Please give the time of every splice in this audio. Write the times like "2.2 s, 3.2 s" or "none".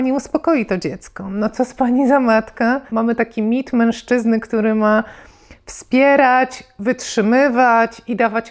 2.9 s